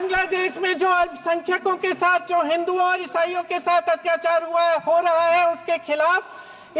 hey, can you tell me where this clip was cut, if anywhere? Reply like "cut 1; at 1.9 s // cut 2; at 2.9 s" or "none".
none